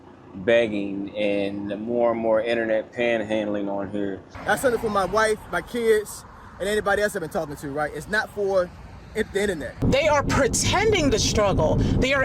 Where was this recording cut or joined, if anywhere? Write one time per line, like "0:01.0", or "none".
0:04.3
0:09.8